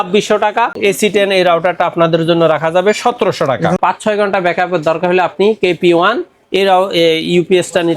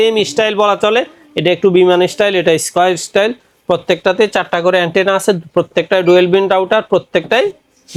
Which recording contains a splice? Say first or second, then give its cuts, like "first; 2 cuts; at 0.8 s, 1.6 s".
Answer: first; 2 cuts; at 0.8 s, 3.8 s